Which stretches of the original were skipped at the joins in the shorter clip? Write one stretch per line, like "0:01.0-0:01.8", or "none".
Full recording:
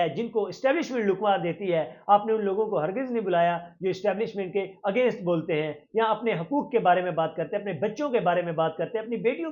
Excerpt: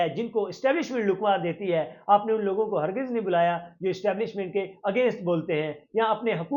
none